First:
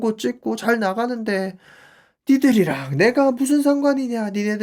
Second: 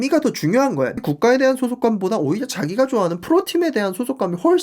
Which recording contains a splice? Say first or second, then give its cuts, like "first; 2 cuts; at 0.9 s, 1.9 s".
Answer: second; 1 cut; at 1.0 s